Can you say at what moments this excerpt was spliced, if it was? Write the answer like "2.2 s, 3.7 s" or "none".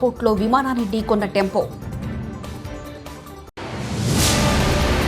3.6 s